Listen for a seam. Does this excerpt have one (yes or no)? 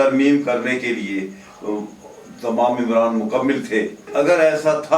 yes